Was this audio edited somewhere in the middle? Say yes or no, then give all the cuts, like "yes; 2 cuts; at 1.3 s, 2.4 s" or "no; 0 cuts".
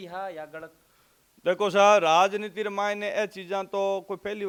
no; 0 cuts